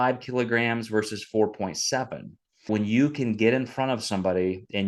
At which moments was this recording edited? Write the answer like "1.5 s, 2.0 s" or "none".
2.7 s